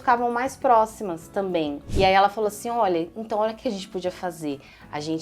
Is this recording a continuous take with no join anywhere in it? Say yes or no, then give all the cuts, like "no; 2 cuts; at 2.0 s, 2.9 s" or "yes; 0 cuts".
no; 1 cut; at 1.8 s